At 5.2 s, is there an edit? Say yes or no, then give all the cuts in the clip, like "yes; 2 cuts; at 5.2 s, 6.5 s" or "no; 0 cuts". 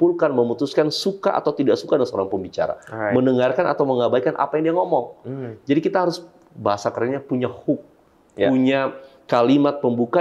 no; 0 cuts